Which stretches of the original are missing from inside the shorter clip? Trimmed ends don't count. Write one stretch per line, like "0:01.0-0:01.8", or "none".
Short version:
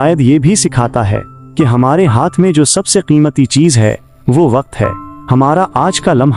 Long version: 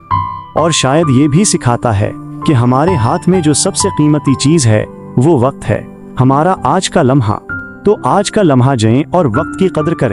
none